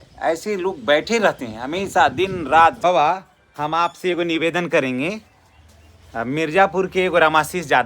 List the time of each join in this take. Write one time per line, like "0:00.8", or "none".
0:02.8